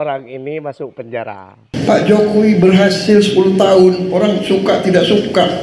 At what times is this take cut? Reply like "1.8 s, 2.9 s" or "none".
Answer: 1.7 s